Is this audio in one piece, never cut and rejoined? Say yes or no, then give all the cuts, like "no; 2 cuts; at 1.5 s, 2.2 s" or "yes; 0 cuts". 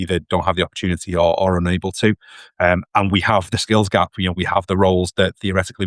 yes; 0 cuts